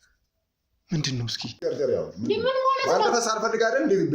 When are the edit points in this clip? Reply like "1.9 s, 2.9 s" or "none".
1.6 s